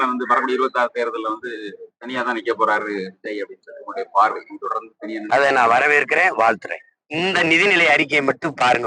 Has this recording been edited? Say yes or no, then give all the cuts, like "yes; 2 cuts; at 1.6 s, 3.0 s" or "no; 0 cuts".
yes; 1 cut; at 7.1 s